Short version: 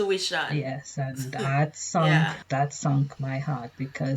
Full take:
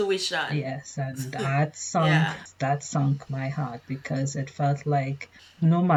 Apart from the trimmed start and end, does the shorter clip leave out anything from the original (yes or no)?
yes